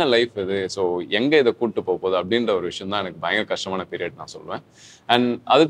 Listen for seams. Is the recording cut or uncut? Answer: uncut